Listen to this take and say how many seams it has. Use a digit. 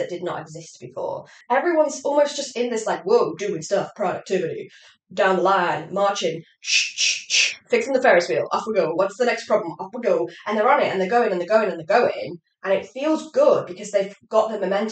1